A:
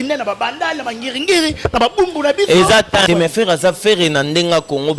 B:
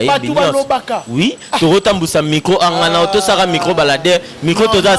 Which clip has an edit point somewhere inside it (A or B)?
A